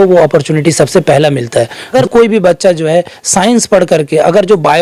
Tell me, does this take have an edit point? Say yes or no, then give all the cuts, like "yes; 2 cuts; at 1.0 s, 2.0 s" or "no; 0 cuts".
yes; 1 cut; at 1.8 s